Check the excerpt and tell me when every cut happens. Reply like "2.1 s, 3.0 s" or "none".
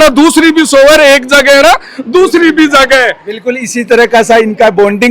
none